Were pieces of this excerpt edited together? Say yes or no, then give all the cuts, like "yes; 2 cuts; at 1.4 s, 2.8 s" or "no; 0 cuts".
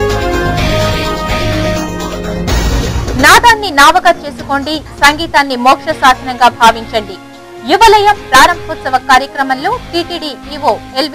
yes; 2 cuts; at 0.8 s, 2.8 s